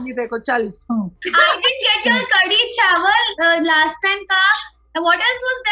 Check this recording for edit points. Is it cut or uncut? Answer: uncut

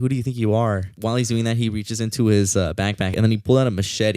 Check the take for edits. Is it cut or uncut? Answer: cut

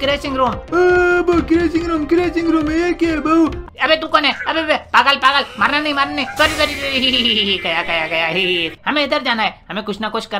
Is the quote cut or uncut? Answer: cut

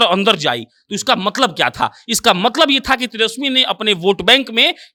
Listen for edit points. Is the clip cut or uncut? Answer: uncut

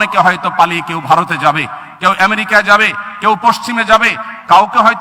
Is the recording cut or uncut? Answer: uncut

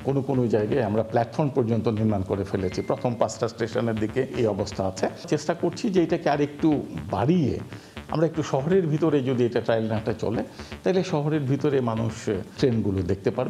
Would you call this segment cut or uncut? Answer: cut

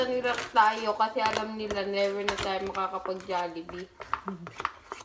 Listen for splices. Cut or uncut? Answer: uncut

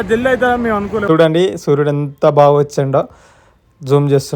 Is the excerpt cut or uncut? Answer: cut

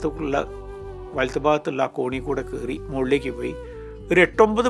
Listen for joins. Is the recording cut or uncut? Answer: uncut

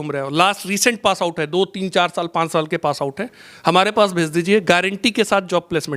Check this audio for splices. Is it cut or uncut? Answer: uncut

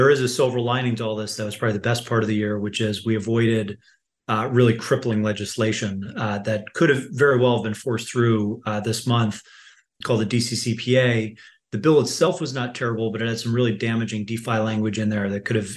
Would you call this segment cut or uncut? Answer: uncut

